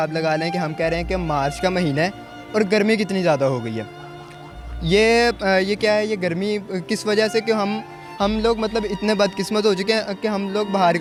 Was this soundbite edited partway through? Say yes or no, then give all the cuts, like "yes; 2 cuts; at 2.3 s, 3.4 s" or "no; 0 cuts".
no; 0 cuts